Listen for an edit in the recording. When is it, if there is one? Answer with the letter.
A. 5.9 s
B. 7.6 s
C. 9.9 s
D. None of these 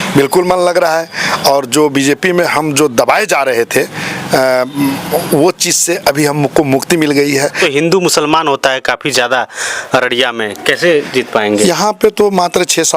B